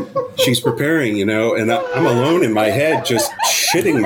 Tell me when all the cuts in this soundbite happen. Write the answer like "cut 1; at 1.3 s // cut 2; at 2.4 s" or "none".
none